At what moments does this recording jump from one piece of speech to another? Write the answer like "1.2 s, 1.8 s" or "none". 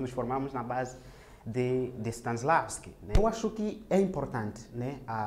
3.2 s